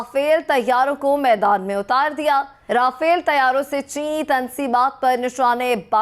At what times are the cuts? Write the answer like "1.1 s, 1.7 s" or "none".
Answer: 2.6 s